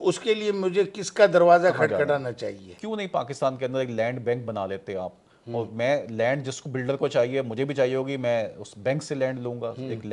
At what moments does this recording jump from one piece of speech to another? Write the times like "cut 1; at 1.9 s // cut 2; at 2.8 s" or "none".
cut 1; at 2.7 s